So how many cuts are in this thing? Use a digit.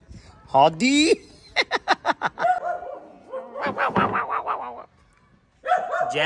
1